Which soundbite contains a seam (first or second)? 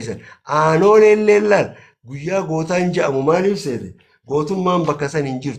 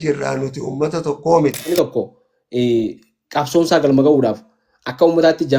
second